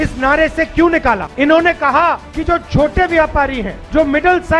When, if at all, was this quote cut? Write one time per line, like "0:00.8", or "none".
0:01.3